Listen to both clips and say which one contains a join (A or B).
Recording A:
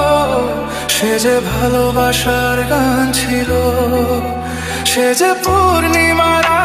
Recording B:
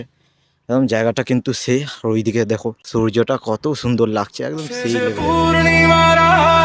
B